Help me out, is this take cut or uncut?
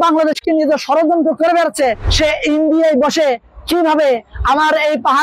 cut